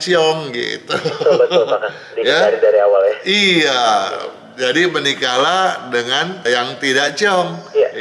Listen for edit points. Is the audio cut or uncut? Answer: uncut